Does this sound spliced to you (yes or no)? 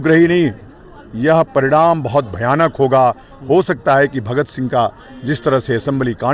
no